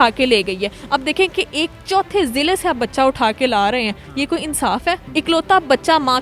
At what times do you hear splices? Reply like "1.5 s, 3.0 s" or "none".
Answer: 5.0 s